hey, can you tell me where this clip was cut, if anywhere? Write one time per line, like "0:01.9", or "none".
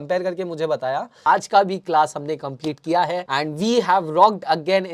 0:01.1
0:03.3